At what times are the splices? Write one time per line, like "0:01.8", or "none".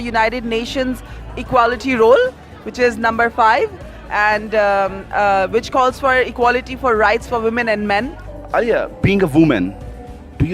0:08.2